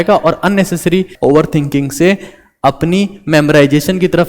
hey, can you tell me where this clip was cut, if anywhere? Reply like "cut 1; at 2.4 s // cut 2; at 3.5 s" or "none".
cut 1; at 1.1 s

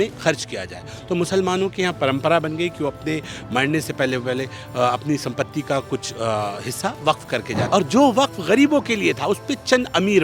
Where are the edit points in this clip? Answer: cut 1; at 7.6 s

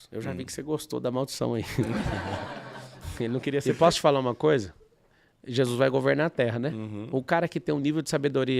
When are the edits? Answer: cut 1; at 3.5 s

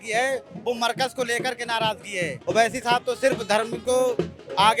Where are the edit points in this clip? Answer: cut 1; at 2.4 s // cut 2; at 3.8 s

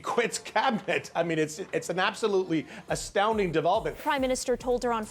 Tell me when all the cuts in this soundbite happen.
cut 1; at 3.9 s

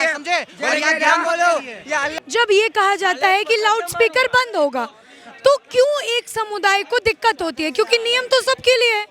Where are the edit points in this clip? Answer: none

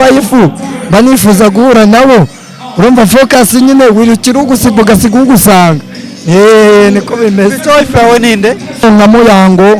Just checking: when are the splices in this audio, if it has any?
cut 1; at 8.8 s

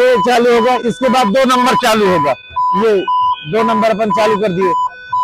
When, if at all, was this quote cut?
none

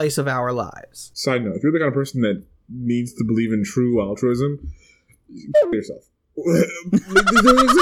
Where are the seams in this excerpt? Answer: cut 1; at 1.1 s

